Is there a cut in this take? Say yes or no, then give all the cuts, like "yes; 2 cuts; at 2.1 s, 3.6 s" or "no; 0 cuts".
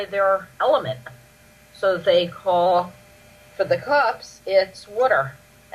yes; 1 cut; at 4.7 s